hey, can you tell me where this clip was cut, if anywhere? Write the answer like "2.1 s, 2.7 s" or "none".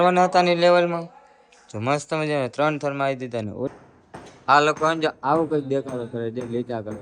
3.7 s